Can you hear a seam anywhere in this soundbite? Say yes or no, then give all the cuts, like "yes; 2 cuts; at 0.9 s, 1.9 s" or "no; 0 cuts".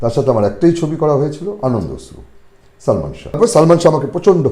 yes; 1 cut; at 3.2 s